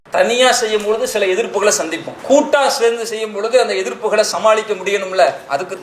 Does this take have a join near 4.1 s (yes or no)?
no